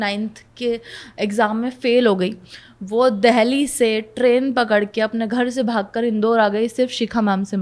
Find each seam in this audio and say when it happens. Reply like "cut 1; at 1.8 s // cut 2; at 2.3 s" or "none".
none

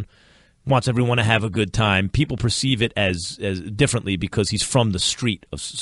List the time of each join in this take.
cut 1; at 2.0 s

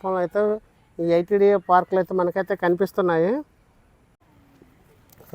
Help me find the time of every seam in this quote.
cut 1; at 4.2 s

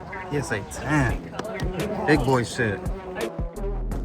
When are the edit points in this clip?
cut 1; at 2.8 s

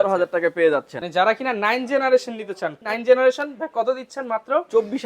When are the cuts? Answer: cut 1; at 1.0 s // cut 2; at 2.8 s

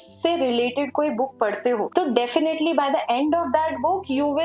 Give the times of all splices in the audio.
none

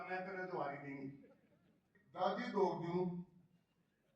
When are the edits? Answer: cut 1; at 1.9 s

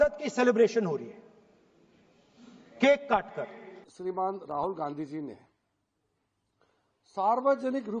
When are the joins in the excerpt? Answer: cut 1; at 3.8 s

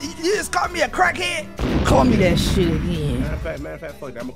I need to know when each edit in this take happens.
none

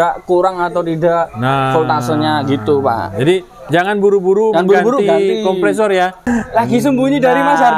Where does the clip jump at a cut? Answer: cut 1; at 6.3 s

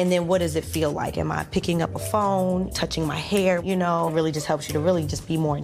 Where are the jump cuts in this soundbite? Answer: cut 1; at 2.5 s

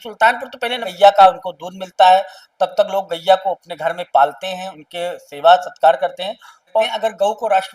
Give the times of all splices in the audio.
cut 1; at 0.9 s // cut 2; at 6.8 s

